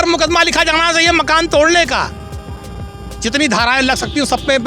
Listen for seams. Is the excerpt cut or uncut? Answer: uncut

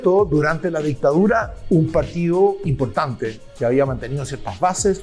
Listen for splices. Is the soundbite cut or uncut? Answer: uncut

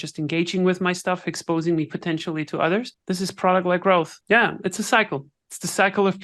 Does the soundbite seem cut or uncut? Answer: cut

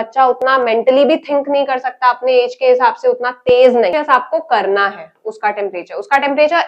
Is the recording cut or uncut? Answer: cut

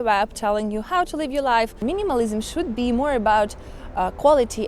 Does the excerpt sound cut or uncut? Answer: cut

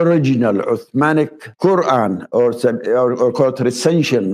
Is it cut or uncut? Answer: cut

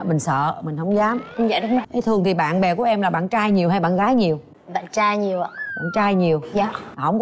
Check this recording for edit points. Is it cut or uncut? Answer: cut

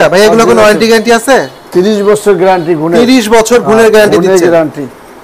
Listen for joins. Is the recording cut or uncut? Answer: uncut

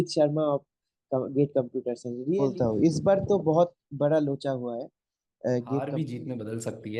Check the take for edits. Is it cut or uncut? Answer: cut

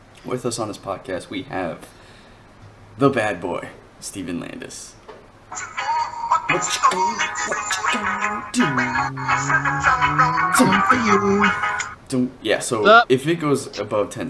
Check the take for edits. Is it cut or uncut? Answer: uncut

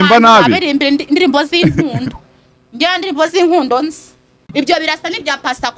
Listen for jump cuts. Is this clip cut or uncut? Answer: cut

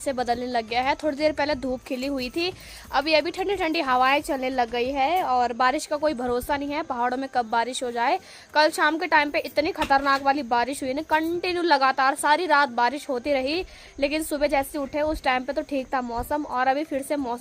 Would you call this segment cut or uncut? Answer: uncut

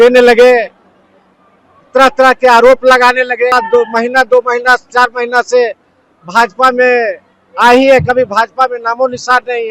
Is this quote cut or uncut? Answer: cut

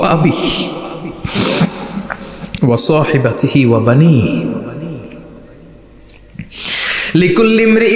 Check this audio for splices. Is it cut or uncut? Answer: cut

